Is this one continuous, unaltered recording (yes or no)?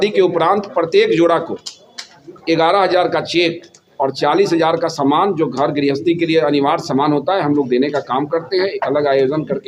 yes